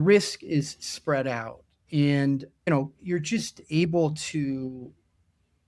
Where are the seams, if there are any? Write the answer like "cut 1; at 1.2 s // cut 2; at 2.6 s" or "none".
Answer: none